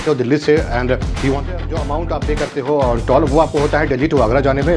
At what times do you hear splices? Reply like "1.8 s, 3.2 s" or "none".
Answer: 1.4 s